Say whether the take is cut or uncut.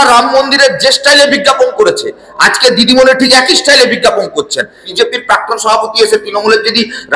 cut